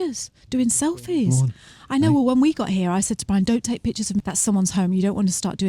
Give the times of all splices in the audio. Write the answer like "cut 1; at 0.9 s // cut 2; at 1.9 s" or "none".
cut 1; at 4.2 s